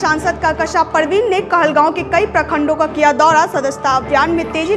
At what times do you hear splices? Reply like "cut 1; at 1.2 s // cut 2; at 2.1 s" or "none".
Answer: none